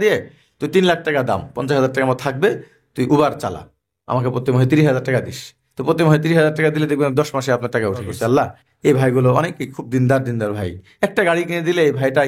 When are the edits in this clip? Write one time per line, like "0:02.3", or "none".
0:08.2